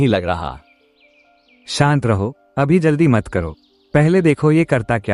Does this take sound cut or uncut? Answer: uncut